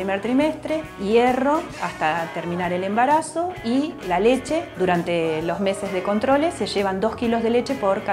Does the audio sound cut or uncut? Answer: cut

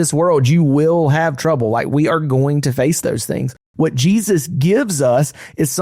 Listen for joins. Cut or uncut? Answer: cut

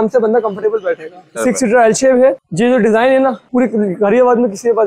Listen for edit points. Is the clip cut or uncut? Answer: cut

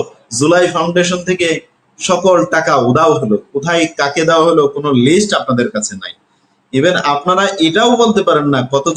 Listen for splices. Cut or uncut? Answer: uncut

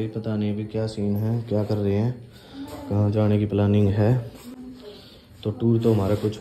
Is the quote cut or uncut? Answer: uncut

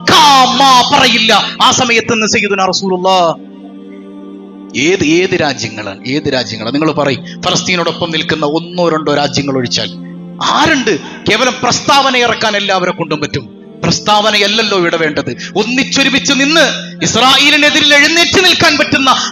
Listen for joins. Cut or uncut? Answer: uncut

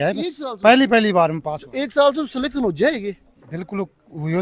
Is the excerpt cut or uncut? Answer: uncut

